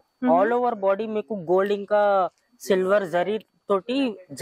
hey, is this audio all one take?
yes; 0 cuts

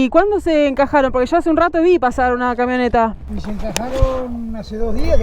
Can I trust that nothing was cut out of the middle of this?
no; 1 cut; at 3.2 s

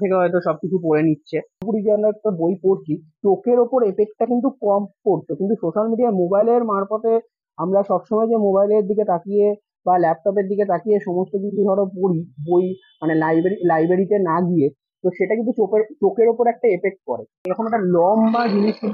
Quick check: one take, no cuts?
no; 2 cuts; at 1.7 s, 17.5 s

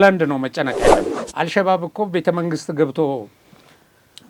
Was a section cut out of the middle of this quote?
yes; 1 cut; at 1.2 s

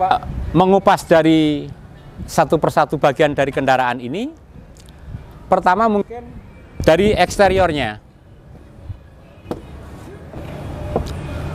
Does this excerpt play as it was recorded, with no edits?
yes; 0 cuts

